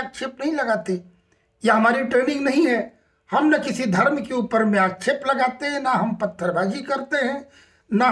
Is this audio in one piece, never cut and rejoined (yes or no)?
yes